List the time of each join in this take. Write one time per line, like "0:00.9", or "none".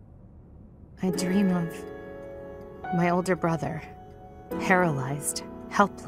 0:01.0